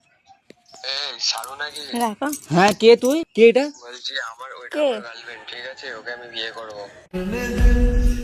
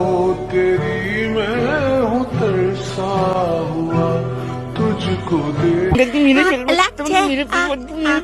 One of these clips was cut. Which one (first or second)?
first